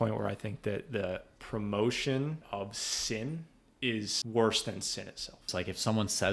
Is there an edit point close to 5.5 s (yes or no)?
yes